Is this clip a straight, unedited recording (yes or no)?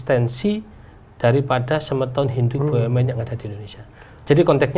yes